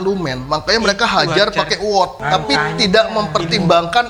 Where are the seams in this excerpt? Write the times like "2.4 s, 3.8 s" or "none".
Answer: 2.2 s